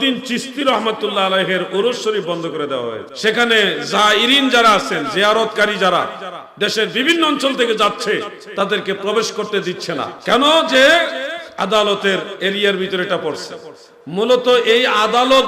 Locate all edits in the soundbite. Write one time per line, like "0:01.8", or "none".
0:03.1
0:10.1